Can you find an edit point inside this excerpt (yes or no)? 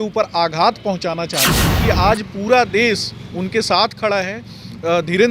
yes